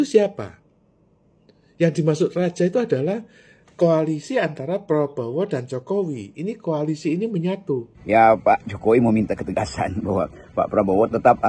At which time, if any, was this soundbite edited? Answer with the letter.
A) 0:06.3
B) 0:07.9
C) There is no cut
B